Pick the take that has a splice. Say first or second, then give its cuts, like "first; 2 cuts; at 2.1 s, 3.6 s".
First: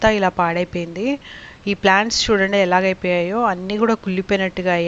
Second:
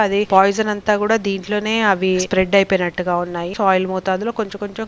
second; 1 cut; at 3.5 s